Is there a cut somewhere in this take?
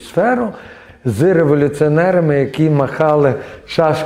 no; 0 cuts

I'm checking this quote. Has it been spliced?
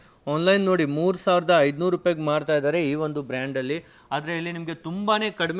no; 0 cuts

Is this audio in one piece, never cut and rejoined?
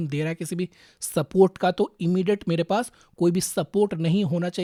yes; 0 cuts

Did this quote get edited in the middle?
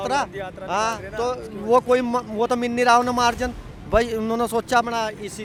no; 0 cuts

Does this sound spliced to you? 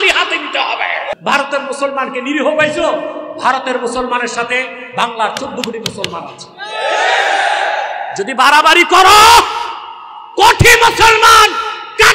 yes; 1 cut; at 1.1 s

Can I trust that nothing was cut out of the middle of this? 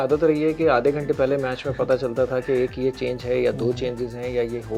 yes; 0 cuts

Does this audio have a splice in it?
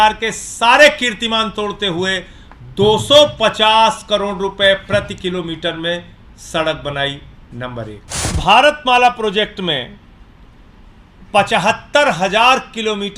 yes; 1 cut; at 8.3 s

